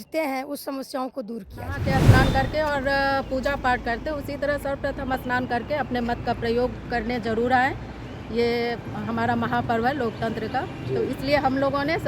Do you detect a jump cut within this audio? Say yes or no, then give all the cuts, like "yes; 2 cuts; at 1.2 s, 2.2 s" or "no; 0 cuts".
yes; 1 cut; at 1.8 s